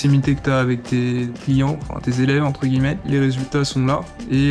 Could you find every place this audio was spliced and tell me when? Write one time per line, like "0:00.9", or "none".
0:01.4
0:03.0

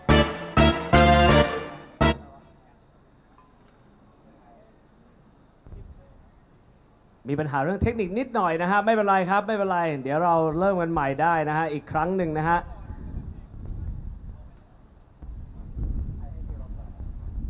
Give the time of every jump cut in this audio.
0:15.2

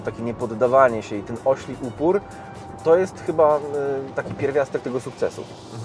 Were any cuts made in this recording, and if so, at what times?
none

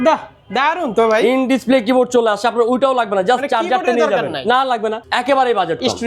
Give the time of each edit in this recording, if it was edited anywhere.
0:05.0

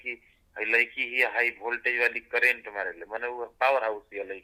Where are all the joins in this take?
none

